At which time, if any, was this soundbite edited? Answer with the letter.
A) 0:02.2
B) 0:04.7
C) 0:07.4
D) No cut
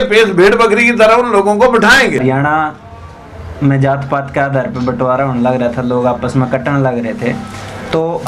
A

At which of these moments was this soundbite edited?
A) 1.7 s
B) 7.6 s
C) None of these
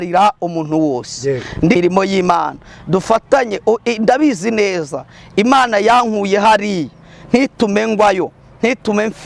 A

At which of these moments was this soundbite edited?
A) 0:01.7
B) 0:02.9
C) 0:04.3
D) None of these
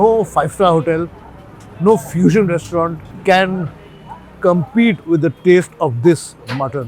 B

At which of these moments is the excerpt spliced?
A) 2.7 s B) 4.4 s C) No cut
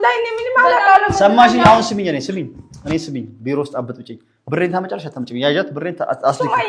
C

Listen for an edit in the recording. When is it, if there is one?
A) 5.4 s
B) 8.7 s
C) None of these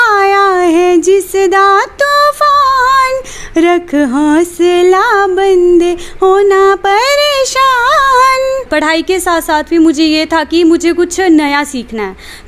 B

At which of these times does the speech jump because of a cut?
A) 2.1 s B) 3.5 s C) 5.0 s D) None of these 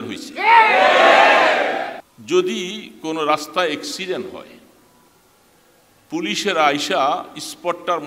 A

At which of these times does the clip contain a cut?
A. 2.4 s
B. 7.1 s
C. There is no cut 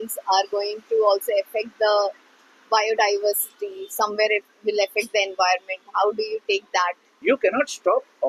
B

